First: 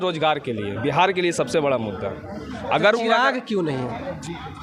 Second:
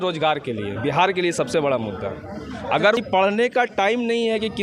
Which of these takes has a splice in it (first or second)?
second